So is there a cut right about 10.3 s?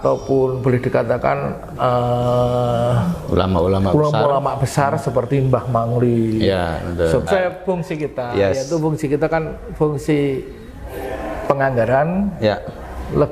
no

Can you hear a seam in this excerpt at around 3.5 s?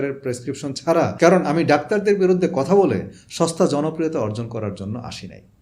no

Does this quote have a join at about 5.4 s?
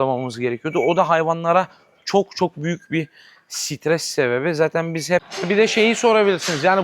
yes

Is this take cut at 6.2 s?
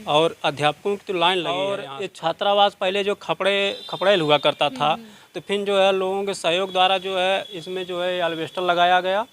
no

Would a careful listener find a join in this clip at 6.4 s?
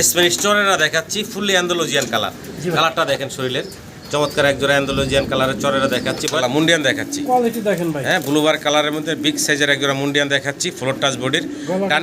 yes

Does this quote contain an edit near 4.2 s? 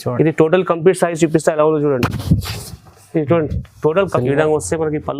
yes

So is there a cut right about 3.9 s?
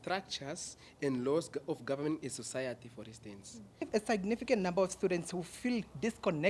yes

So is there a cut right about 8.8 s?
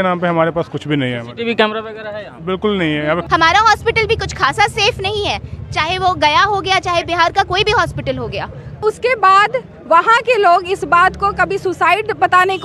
yes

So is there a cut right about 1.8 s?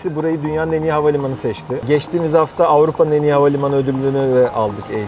yes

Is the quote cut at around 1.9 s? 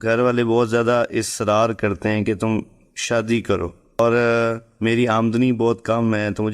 no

